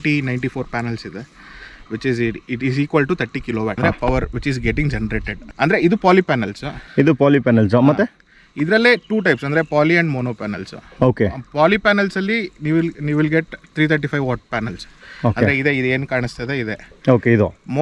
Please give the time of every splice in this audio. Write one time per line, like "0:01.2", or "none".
none